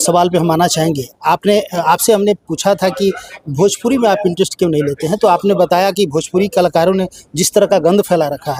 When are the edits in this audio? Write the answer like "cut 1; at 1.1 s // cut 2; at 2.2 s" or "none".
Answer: none